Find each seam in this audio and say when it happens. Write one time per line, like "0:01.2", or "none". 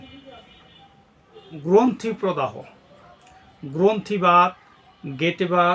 0:01.5

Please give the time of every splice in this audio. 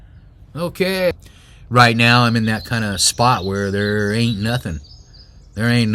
0:01.1

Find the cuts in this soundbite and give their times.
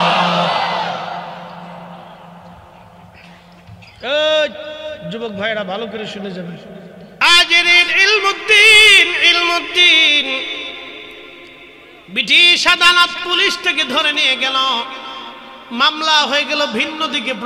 0:07.2

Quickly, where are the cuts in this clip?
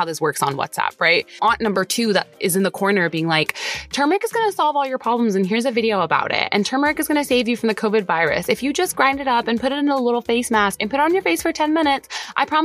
0:01.4

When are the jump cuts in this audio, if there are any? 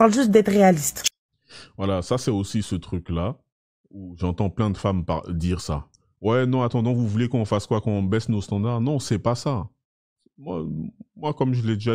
none

